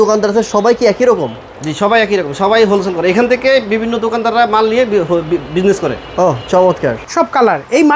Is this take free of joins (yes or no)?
no